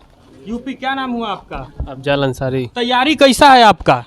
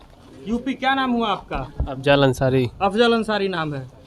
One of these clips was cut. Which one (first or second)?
first